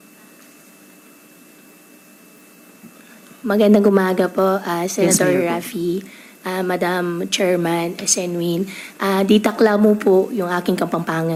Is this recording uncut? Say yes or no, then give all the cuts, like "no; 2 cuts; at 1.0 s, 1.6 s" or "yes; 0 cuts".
yes; 0 cuts